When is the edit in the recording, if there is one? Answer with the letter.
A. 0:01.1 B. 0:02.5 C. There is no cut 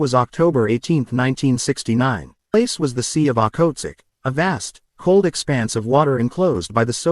B